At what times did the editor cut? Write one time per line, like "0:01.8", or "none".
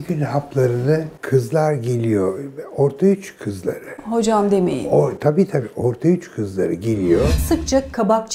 0:01.1
0:07.4